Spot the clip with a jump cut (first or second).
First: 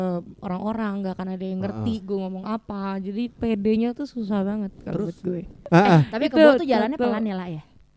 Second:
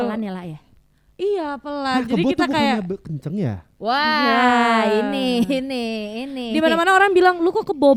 first